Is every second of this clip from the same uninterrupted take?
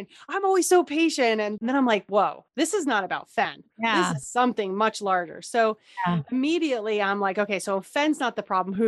no; 1 cut; at 1.6 s

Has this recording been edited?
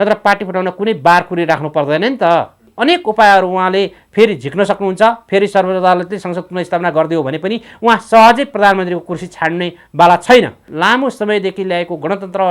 yes; 2 cuts; at 2.7 s, 10.7 s

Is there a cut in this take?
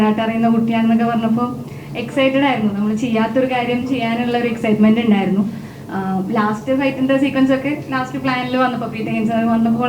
no; 0 cuts

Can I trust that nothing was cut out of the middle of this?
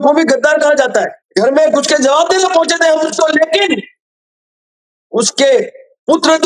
no; 1 cut; at 1.2 s

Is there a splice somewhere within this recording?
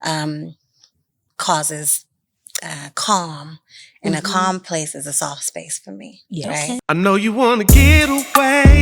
yes; 1 cut; at 6.8 s

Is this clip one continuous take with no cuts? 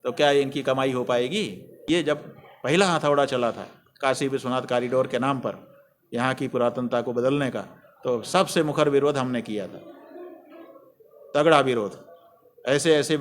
no; 1 cut; at 1.8 s

